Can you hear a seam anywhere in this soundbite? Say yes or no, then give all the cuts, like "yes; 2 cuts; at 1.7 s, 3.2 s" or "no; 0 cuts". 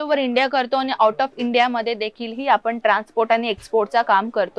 no; 0 cuts